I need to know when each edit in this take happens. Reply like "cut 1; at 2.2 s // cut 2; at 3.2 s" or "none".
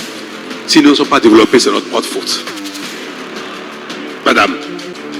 cut 1; at 2.3 s // cut 2; at 3.6 s